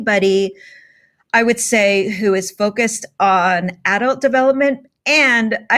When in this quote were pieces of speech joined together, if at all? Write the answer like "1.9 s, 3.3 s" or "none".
none